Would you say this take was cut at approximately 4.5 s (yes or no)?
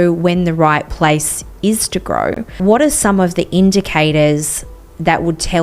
no